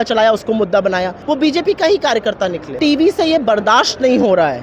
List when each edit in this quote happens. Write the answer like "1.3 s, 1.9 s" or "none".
1.2 s, 2.8 s